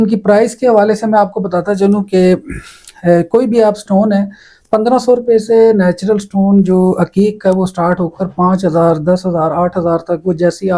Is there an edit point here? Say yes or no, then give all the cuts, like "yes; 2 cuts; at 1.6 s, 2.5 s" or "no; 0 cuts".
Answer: no; 0 cuts